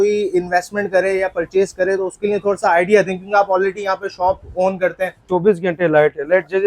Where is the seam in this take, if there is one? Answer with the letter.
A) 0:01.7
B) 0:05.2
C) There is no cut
B